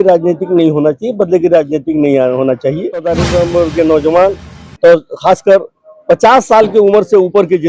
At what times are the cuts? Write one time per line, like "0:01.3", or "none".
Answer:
0:03.0